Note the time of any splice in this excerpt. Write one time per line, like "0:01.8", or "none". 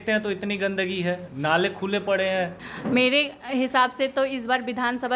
0:02.7